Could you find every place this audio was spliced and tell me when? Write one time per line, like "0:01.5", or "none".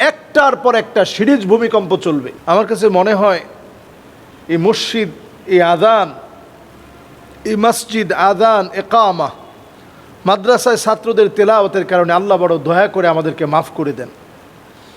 0:02.3